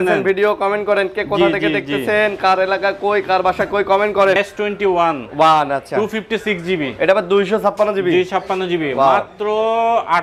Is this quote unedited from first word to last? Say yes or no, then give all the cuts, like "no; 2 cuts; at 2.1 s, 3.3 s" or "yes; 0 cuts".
no; 1 cut; at 4.4 s